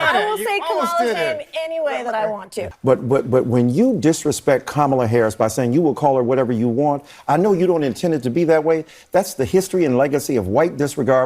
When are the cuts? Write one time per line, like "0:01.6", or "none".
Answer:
0:02.6